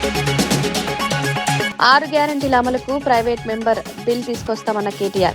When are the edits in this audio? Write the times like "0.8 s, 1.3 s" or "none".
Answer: 1.7 s